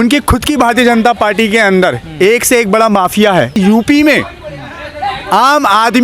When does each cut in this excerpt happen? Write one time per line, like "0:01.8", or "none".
0:03.6